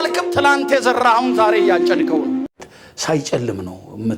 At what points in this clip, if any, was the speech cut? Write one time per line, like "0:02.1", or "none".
0:02.6